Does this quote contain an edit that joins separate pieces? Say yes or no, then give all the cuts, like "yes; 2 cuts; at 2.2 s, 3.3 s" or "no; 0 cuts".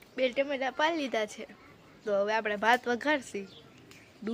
no; 0 cuts